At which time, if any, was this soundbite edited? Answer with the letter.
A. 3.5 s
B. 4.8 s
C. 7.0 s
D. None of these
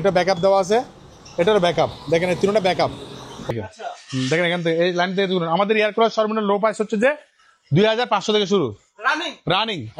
A